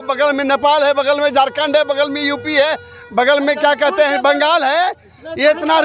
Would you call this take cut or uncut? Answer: uncut